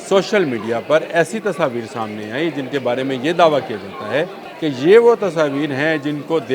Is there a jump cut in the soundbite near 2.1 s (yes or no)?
no